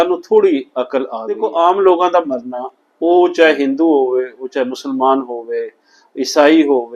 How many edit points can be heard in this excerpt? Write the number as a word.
one